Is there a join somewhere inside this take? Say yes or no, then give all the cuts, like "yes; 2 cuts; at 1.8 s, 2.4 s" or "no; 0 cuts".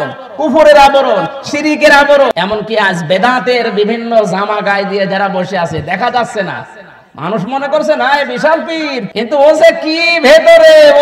yes; 2 cuts; at 2.3 s, 9.1 s